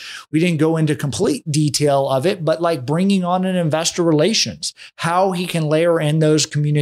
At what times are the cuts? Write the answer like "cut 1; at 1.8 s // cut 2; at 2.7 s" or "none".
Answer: none